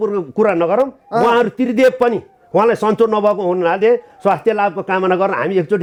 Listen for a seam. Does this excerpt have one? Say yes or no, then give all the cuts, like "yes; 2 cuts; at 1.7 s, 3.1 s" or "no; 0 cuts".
no; 0 cuts